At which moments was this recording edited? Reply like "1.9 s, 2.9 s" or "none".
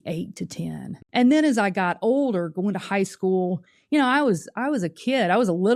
0.9 s